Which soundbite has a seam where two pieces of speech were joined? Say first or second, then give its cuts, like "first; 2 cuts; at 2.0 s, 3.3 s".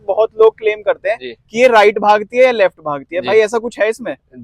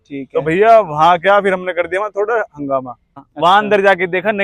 second; 1 cut; at 3.3 s